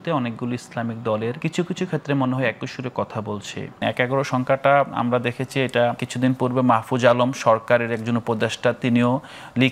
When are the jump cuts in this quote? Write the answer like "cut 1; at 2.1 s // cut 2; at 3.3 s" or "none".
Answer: cut 1; at 1.4 s // cut 2; at 3.8 s // cut 3; at 6.1 s